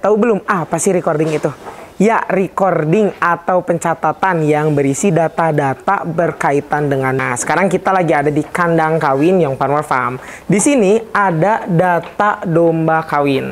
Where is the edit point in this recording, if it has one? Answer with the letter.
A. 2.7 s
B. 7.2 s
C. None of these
B